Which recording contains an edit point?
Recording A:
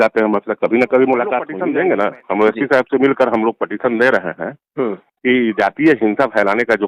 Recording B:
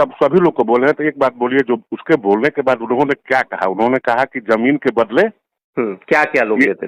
A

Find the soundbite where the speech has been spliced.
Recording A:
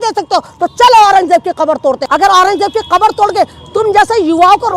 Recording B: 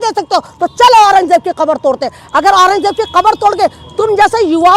A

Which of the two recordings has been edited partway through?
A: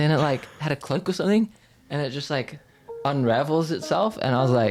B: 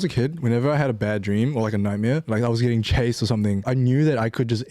B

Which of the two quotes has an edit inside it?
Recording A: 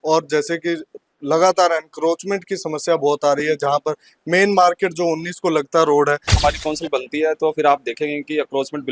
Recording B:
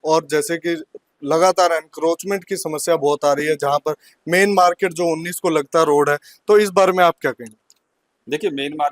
A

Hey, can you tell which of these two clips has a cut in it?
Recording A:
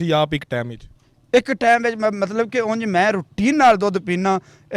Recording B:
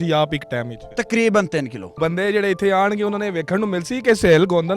B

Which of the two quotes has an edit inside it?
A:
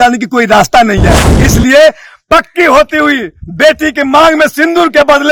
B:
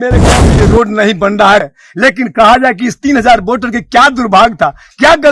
B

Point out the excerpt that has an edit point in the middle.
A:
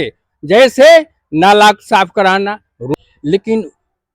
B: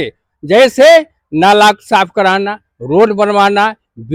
A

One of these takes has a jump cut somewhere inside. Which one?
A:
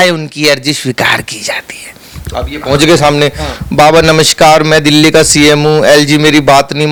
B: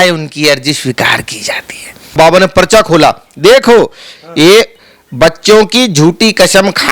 B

